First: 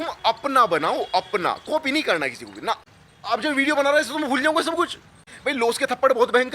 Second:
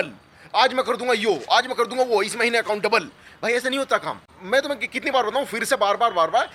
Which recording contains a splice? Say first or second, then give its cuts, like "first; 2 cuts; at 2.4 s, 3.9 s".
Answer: first; 2 cuts; at 2.9 s, 5.3 s